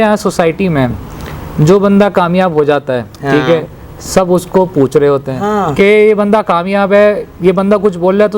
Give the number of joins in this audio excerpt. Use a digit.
1